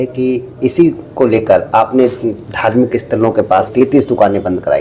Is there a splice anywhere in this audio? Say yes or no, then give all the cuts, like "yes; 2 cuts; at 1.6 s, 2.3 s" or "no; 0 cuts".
yes; 1 cut; at 3.7 s